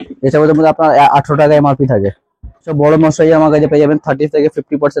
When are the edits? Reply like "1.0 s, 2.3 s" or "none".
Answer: 2.7 s